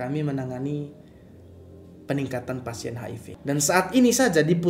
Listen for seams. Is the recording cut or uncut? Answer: cut